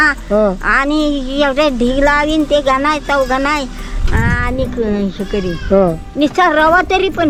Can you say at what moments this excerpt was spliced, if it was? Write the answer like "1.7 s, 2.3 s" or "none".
none